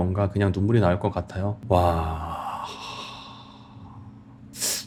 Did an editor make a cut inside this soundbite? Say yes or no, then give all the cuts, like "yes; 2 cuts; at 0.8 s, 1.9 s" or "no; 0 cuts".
no; 0 cuts